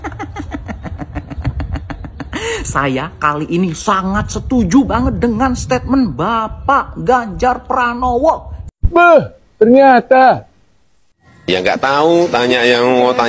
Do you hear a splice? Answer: yes; 1 cut; at 8.6 s

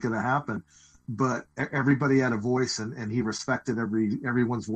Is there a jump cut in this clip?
yes; 1 cut; at 1.6 s

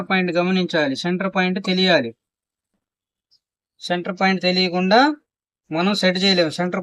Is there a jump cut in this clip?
yes; 1 cut; at 2.7 s

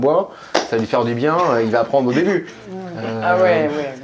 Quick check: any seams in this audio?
no; 0 cuts

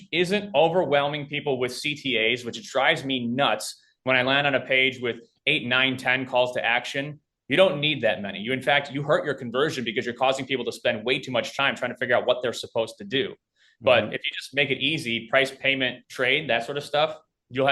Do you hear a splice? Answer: yes; 2 cuts; at 11.5 s, 16.0 s

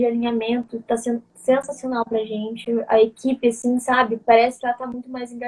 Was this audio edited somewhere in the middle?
no; 0 cuts

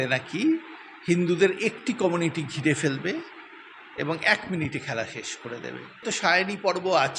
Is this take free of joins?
no; 1 cut; at 6.0 s

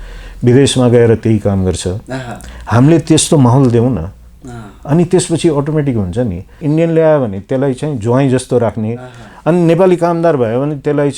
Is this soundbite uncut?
no; 1 cut; at 6.6 s

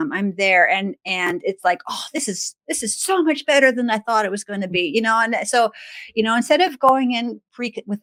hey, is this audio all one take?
yes; 0 cuts

